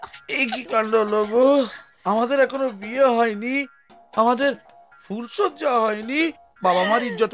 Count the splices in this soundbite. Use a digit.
0